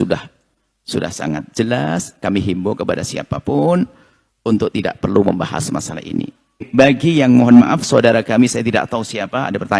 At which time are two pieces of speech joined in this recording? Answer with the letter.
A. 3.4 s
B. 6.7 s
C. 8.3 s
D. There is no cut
B